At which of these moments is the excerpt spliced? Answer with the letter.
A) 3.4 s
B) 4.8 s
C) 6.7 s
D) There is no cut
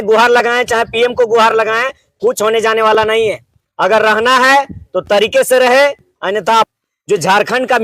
C